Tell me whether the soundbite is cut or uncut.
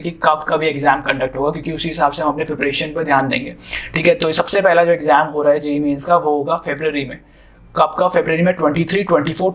uncut